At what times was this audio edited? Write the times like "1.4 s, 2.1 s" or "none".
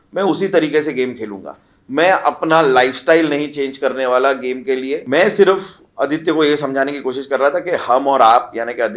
5.0 s